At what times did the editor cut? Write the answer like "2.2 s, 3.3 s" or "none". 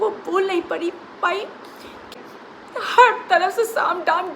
2.1 s